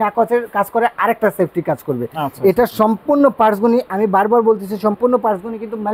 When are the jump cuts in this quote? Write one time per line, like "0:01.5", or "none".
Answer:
none